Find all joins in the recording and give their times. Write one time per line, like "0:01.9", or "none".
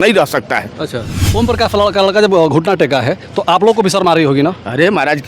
0:01.2